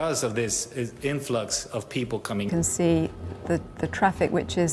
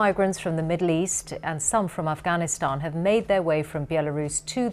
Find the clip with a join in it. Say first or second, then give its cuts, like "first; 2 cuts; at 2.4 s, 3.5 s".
first; 1 cut; at 2.5 s